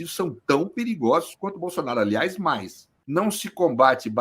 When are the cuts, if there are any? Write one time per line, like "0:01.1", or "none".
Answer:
0:02.8